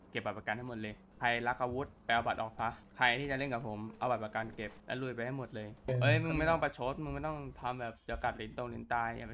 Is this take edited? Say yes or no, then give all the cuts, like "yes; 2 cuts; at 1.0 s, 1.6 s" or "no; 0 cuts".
yes; 5 cuts; at 1.0 s, 2.0 s, 2.8 s, 4.8 s, 5.9 s